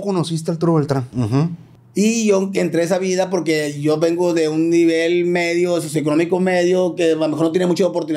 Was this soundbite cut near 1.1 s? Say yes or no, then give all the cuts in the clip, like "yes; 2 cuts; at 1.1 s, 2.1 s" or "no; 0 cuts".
yes; 1 cut; at 1.1 s